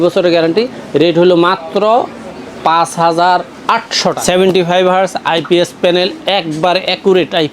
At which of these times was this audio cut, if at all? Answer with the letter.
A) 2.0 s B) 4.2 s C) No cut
B